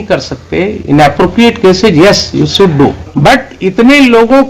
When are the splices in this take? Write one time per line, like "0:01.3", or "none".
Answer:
0:03.0